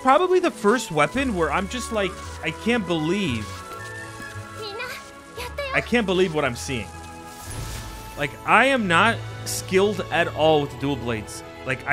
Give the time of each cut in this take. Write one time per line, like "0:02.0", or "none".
none